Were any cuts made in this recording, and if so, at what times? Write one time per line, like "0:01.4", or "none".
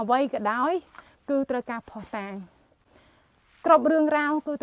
none